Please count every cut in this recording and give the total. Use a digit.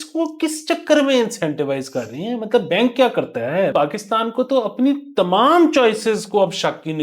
1